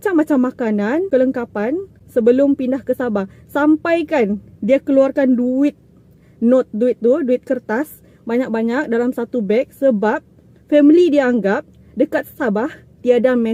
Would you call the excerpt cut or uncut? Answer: uncut